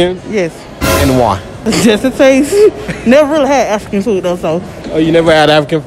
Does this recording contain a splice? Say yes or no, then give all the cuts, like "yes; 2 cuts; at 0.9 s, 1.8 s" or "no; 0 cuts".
yes; 2 cuts; at 1.5 s, 4.8 s